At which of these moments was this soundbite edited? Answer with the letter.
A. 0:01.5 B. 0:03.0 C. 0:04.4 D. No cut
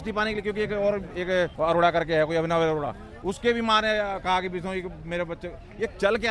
A